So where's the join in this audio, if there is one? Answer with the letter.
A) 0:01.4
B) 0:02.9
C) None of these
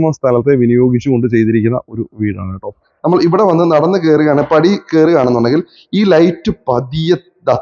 B